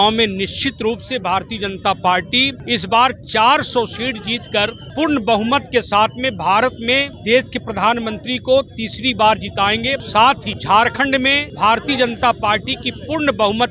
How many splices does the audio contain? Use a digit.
5